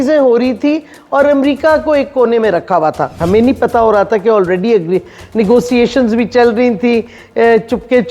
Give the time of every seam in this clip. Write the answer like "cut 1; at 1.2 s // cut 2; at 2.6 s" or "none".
cut 1; at 3.2 s